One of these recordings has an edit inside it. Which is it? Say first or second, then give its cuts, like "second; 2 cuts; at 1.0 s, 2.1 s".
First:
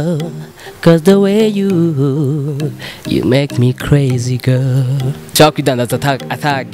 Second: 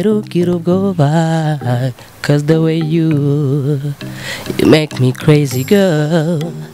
first; 1 cut; at 5.2 s